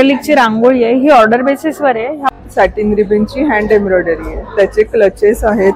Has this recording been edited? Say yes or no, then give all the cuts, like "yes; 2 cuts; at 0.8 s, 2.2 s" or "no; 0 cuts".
yes; 1 cut; at 2.3 s